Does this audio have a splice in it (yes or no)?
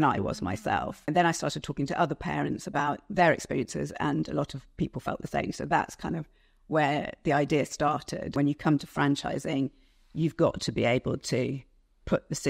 yes